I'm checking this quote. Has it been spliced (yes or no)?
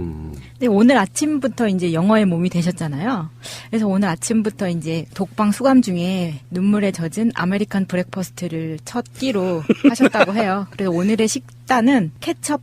yes